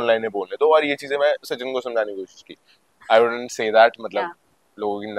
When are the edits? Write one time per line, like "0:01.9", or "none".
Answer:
0:02.8